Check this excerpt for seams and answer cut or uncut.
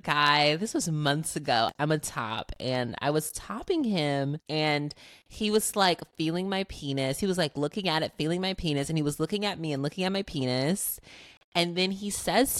cut